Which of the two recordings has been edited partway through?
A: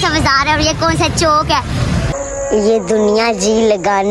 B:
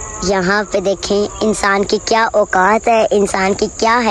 A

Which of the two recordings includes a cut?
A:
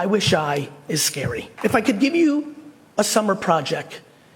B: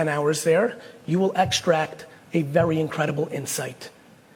A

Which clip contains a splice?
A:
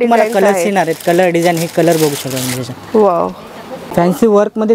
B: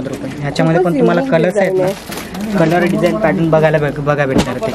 A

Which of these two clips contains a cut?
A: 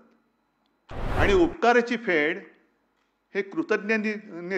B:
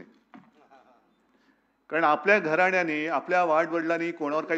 A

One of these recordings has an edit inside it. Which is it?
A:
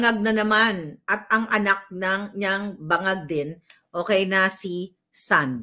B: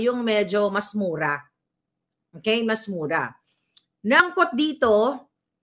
B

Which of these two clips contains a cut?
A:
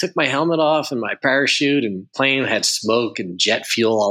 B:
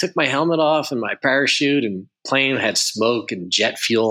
A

